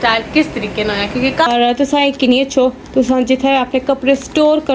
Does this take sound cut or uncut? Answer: cut